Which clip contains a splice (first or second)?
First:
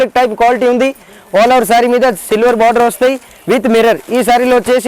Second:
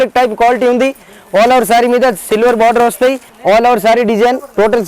second